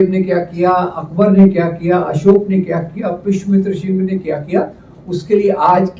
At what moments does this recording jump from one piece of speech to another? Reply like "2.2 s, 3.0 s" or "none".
none